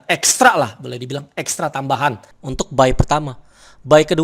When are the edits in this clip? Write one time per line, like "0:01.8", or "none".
0:02.3